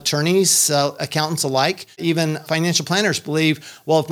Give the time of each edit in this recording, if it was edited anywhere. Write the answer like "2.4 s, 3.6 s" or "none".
1.0 s, 2.4 s